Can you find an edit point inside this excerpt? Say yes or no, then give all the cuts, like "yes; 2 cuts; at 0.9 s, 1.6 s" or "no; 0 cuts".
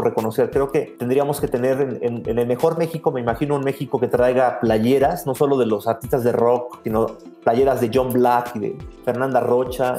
yes; 2 cuts; at 0.9 s, 6.8 s